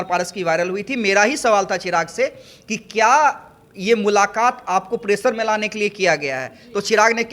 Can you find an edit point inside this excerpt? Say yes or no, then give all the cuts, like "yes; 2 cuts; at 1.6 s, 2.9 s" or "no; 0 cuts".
no; 0 cuts